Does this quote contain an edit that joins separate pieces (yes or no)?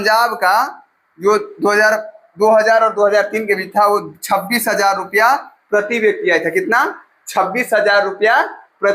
no